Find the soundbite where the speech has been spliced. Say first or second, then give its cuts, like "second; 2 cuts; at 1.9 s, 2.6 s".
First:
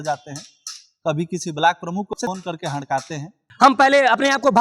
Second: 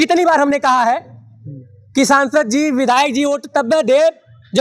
first; 1 cut; at 3.4 s